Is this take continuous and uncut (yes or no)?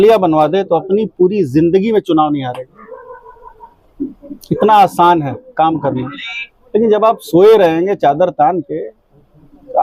yes